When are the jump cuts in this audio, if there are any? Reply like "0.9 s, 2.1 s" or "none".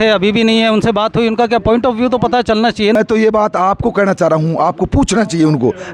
2.9 s